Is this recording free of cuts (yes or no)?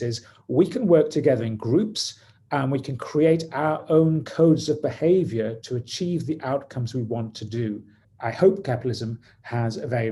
no